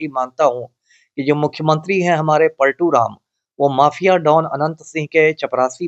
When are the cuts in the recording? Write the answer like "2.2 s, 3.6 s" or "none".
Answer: none